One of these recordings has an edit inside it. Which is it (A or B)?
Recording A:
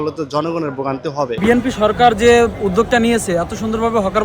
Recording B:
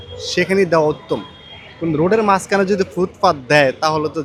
A